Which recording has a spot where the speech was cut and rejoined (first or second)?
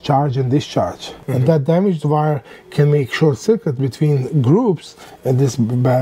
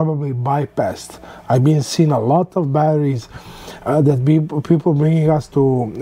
first